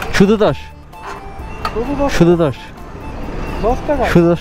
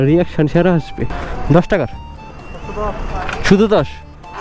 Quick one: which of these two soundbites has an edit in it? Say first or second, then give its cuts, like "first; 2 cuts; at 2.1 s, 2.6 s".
second; 1 cut; at 1.2 s